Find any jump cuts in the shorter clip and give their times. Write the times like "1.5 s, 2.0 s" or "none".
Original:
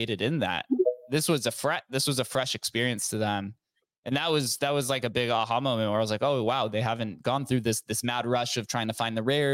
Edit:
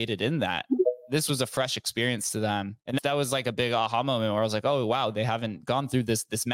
1.2 s, 2.9 s